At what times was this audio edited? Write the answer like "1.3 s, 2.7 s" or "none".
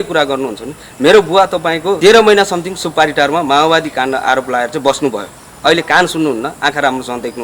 2.0 s